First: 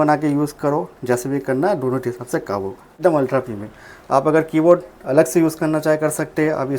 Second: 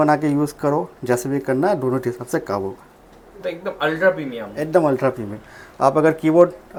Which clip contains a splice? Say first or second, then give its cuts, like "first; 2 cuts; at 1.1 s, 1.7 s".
first; 1 cut; at 3.0 s